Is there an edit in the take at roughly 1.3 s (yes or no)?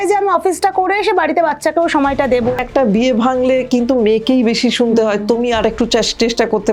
no